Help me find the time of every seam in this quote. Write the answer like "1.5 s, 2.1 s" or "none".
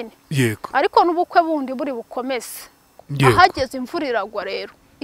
3.0 s